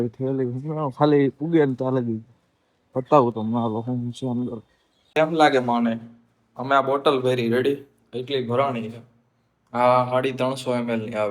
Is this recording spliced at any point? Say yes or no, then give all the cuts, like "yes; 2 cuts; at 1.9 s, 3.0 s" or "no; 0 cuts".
yes; 1 cut; at 5.1 s